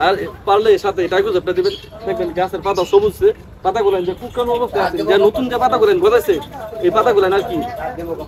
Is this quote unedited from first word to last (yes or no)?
yes